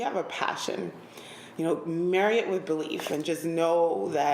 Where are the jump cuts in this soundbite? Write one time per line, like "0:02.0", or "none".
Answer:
none